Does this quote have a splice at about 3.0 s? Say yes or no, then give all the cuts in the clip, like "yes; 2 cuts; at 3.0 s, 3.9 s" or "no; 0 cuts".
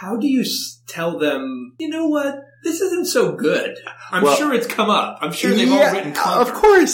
no; 1 cut; at 1.7 s